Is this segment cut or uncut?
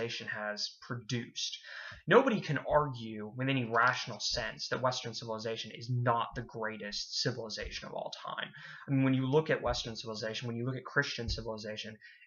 uncut